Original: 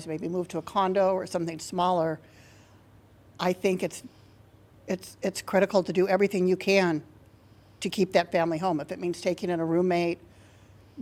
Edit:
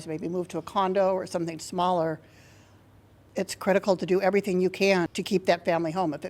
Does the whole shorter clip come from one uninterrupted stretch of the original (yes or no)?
no